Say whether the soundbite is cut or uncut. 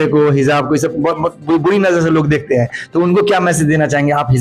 uncut